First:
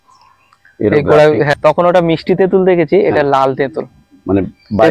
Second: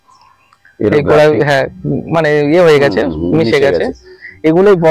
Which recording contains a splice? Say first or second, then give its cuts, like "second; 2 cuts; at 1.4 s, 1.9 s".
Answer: first; 1 cut; at 1.5 s